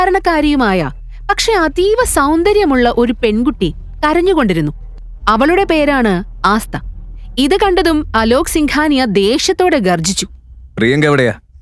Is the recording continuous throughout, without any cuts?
yes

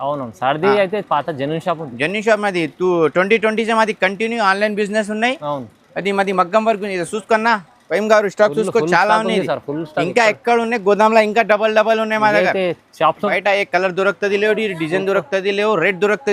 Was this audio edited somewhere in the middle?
yes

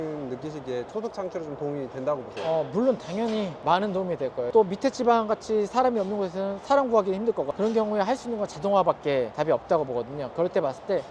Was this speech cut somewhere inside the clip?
yes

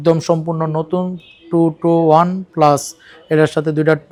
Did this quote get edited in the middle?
no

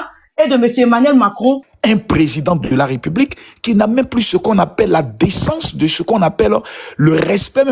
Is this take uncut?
no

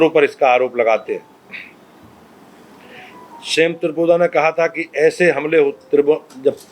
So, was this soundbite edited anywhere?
no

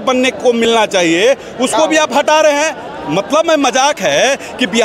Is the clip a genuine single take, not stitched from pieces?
yes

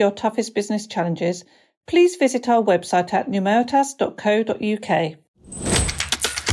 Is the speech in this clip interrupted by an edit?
yes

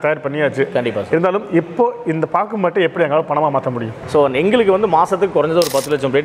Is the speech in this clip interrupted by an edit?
yes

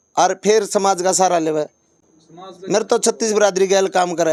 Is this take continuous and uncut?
yes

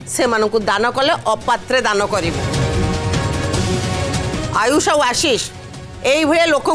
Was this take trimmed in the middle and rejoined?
yes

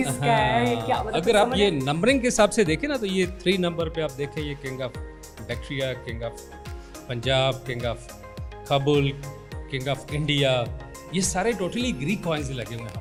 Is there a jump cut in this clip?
no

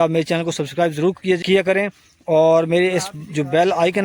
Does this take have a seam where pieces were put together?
yes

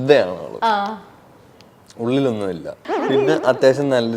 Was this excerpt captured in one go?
no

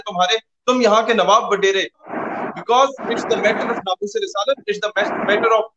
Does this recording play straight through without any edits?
no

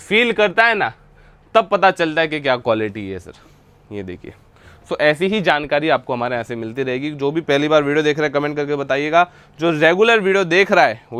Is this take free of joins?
yes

